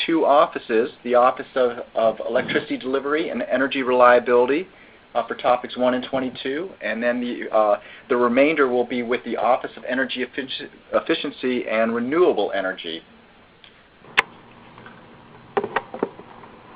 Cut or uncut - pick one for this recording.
uncut